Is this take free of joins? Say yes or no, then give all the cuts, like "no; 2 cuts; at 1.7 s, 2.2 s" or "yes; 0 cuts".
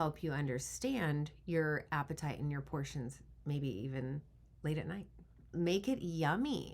no; 1 cut; at 5.5 s